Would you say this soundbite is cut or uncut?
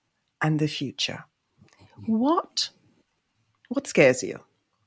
uncut